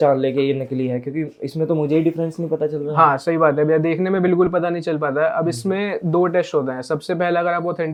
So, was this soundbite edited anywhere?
no; 0 cuts

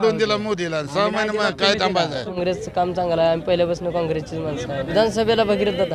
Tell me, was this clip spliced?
yes; 2 cuts; at 2.4 s, 4.9 s

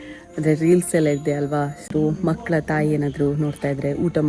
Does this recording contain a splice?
yes; 1 cut; at 1.9 s

